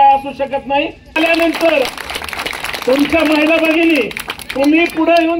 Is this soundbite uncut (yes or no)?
no